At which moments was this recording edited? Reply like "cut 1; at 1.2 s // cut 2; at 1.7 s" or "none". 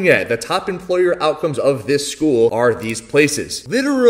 none